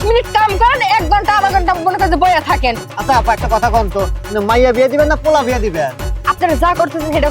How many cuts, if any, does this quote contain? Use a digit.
2